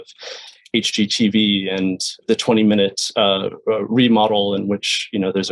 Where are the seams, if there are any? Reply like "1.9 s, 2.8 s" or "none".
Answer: 2.2 s